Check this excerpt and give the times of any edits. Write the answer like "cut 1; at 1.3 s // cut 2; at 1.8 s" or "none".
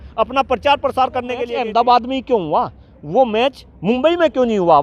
cut 1; at 1.4 s